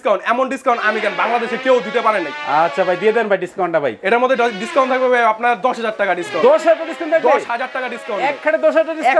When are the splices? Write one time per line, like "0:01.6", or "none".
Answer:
none

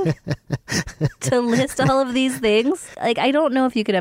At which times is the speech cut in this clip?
0:02.9

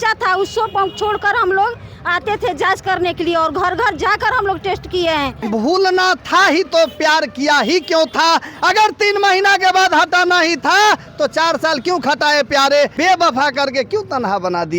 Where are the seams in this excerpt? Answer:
0:05.4
0:12.9

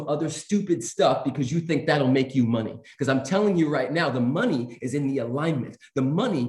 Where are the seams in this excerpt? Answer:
none

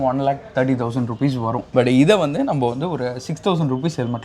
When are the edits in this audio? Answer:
0:01.7

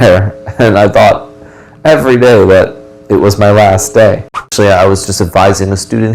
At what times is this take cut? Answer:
0:04.5

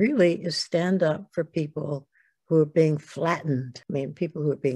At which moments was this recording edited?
0:03.8

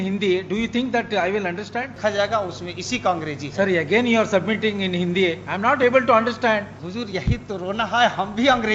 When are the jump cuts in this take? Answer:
0:01.9
0:06.8

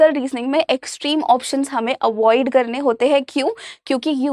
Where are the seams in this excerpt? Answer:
none

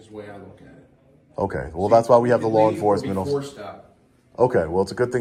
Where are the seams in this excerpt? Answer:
none

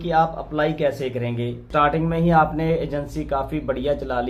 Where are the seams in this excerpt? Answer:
0:01.7

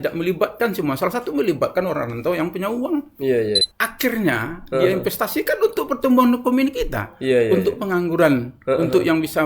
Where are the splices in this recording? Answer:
0:03.7

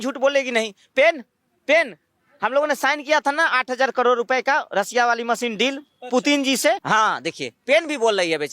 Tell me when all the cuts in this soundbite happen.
0:06.8

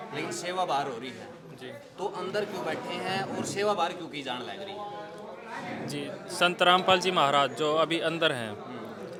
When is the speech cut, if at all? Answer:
none

